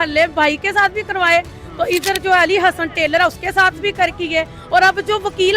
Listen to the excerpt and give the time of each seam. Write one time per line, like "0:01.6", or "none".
none